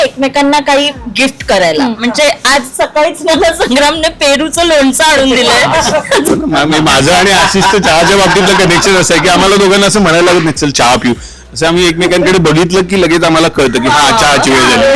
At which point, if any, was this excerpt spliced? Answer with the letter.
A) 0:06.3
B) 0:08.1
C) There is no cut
A